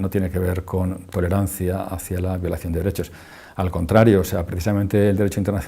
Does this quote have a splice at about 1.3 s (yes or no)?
no